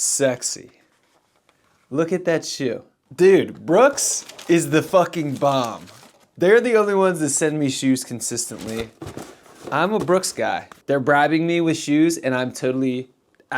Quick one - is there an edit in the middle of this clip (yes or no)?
yes